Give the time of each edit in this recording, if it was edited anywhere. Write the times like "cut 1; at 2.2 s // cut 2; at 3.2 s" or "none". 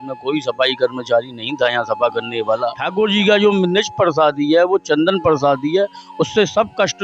cut 1; at 2.8 s